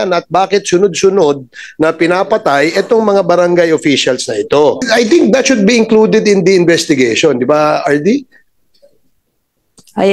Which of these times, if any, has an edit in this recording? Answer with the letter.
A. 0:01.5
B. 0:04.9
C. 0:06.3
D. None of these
B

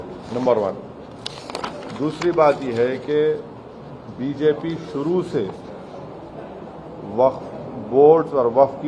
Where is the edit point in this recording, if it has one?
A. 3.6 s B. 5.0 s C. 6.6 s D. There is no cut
D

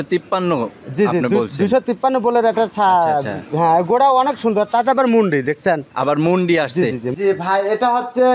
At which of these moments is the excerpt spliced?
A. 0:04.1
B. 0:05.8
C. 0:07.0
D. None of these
C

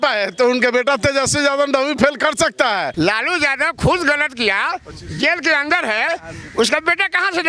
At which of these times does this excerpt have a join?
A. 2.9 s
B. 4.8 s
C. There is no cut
A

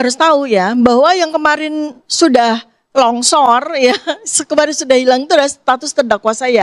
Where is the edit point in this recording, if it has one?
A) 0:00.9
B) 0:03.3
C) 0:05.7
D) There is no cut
D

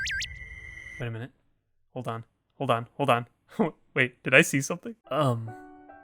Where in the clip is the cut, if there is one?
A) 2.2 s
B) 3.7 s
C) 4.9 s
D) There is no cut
C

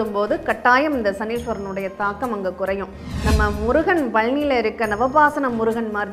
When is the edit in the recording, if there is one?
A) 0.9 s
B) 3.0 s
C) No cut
B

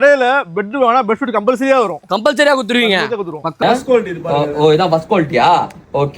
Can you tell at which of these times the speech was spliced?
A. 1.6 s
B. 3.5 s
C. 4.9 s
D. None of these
B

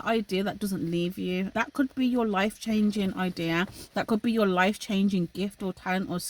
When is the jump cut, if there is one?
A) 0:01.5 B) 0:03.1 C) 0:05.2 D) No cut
A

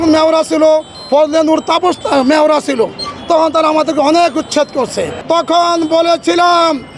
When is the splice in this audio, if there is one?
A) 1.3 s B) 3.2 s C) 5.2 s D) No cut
C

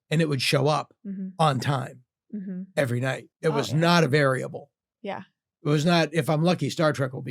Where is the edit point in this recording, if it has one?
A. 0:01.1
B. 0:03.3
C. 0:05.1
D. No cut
B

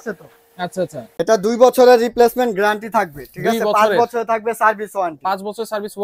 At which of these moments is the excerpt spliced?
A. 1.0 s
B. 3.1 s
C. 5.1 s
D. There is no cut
A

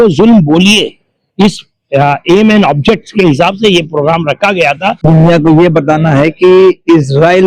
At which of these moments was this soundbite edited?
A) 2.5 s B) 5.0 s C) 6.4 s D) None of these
B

